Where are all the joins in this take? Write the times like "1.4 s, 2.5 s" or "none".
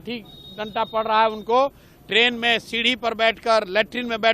none